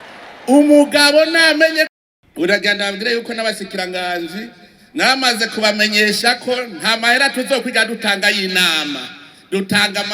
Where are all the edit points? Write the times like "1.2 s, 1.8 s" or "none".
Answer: 1.9 s

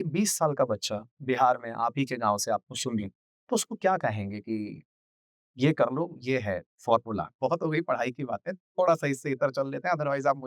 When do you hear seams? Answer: 3.5 s, 7.3 s

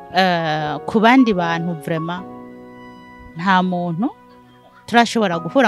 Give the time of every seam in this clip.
none

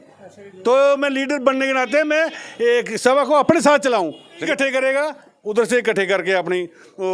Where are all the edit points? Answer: 4.5 s

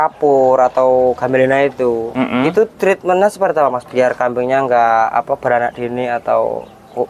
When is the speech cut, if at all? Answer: none

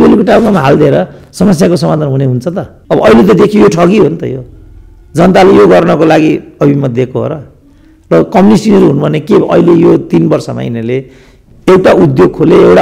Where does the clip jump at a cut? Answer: 2.7 s

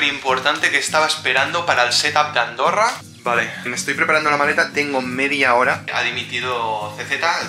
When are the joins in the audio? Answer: 3.1 s, 5.8 s

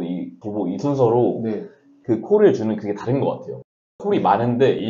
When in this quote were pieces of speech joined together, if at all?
3.9 s

